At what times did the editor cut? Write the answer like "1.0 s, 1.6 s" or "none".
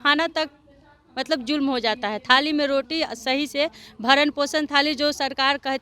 none